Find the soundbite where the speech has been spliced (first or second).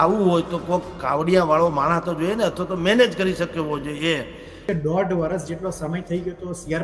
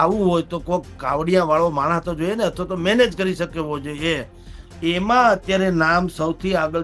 first